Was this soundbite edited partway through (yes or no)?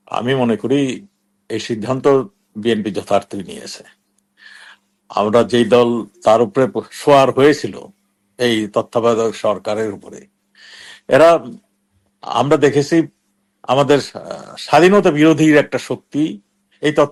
no